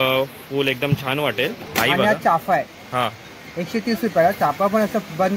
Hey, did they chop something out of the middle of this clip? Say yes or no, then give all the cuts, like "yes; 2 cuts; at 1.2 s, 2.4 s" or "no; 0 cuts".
yes; 1 cut; at 1.6 s